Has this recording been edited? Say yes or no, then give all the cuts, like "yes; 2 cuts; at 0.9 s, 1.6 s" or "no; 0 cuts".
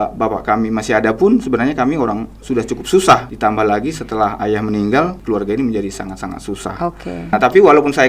yes; 3 cuts; at 3.3 s, 5.2 s, 7.3 s